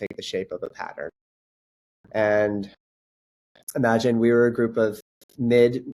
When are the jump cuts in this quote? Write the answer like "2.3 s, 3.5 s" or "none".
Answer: none